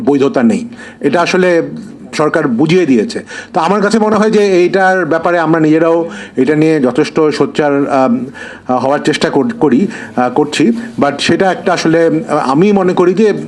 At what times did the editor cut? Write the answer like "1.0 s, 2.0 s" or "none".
none